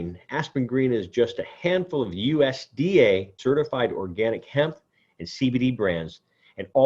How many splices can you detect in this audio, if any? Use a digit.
1